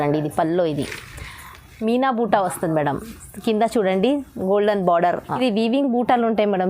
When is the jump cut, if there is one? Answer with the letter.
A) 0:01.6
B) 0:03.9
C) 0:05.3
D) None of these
C